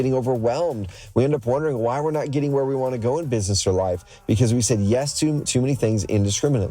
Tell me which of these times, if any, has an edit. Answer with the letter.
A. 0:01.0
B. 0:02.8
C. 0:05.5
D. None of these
C